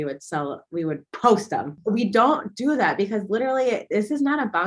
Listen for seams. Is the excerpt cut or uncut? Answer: cut